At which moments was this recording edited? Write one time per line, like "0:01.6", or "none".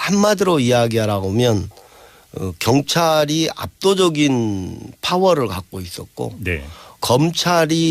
0:06.7